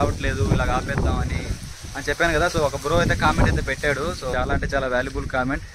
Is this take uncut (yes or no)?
no